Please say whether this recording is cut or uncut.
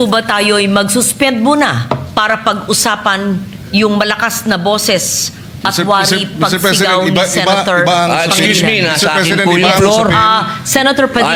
uncut